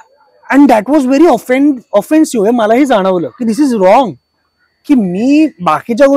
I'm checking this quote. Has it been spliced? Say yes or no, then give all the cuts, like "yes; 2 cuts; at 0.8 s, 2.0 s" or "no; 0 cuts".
no; 0 cuts